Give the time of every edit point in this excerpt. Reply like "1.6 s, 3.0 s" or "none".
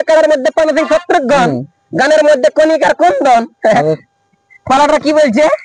none